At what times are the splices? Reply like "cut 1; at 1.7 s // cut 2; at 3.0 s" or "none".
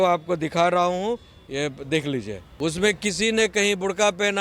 cut 1; at 2.4 s